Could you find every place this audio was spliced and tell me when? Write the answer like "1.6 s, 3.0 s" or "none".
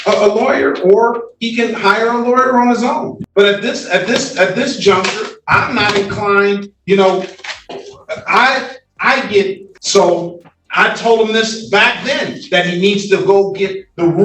9.7 s

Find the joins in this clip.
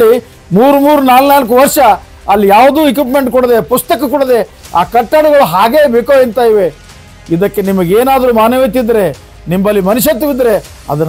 9.3 s

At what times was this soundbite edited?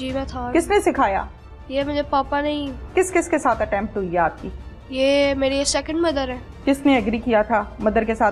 2.9 s, 6.4 s

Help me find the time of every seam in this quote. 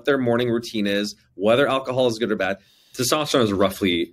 2.7 s

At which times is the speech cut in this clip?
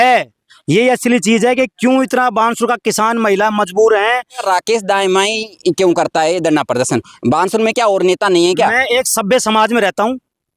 4.4 s

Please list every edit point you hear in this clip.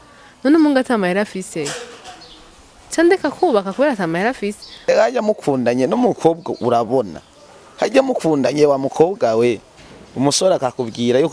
4.9 s

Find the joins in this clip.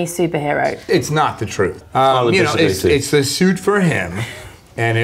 0.8 s, 1.8 s

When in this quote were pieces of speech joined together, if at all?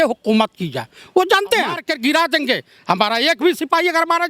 1.9 s

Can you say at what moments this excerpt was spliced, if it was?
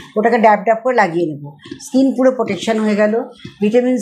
none

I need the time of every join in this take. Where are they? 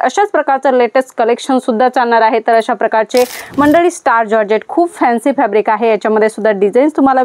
3.4 s

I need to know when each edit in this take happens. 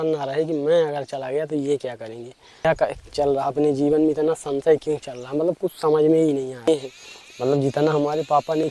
2.6 s, 6.7 s

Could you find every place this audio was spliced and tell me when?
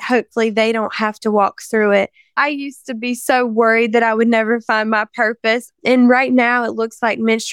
2.4 s, 5.7 s

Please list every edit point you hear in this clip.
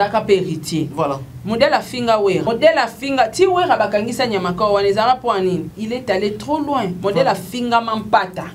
0.9 s, 2.4 s, 5.7 s

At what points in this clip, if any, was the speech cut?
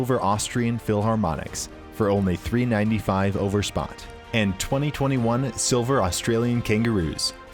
none

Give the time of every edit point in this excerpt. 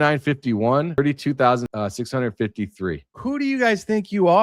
1.0 s, 1.7 s, 3.2 s

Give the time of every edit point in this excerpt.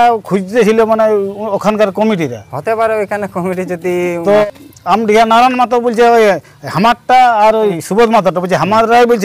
4.7 s, 7.8 s

